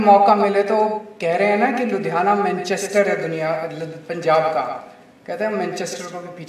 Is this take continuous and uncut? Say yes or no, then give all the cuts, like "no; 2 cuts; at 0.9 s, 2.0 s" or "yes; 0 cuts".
yes; 0 cuts